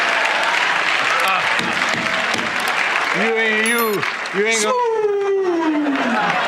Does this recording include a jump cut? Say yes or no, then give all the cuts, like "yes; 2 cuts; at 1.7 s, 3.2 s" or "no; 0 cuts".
yes; 1 cut; at 3.1 s